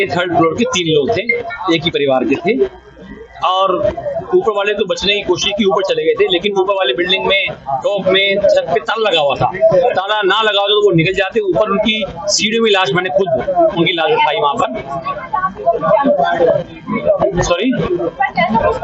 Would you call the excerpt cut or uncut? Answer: uncut